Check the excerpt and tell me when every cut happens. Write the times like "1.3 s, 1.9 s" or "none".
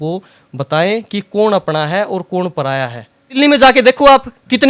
3.3 s